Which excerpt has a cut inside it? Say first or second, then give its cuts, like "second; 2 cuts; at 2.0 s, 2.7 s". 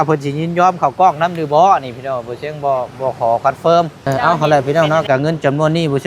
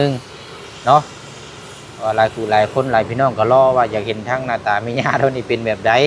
first; 1 cut; at 4.0 s